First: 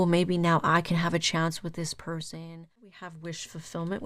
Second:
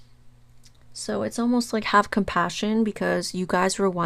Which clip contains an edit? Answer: first; 1 cut; at 2.9 s

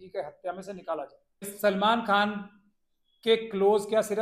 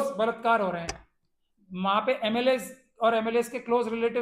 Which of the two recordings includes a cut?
first; 1 cut; at 1.5 s

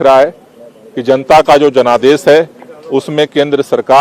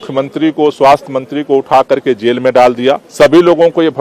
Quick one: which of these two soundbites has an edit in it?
second; 1 cut; at 3.1 s

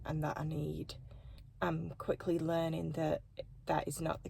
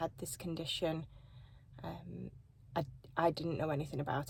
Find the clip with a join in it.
first; 1 cut; at 1.5 s

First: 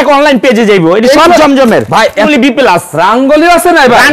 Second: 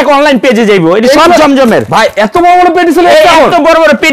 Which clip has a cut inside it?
first; 1 cut; at 2.3 s

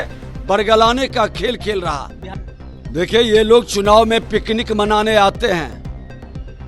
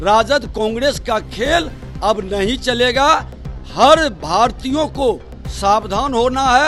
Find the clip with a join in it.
first; 1 cut; at 2.2 s

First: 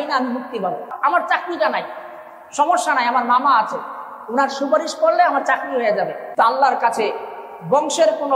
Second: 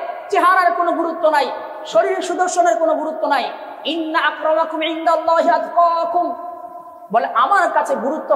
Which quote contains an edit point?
first; 2 cuts; at 1.0 s, 6.3 s

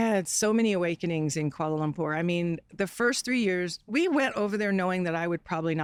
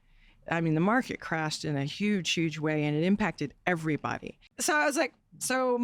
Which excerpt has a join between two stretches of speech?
second; 1 cut; at 4.5 s

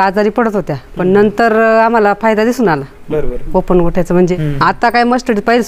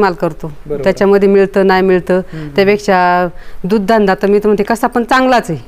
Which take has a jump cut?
first; 1 cut; at 4.4 s

